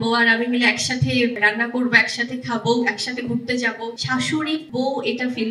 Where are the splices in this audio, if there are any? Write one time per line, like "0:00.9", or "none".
0:01.4
0:04.4